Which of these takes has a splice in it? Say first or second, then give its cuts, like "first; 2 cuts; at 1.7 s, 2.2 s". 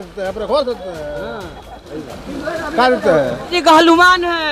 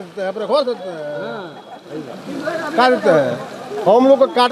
first; 1 cut; at 3.5 s